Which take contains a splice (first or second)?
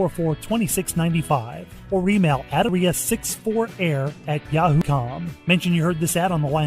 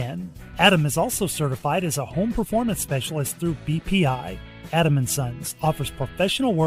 first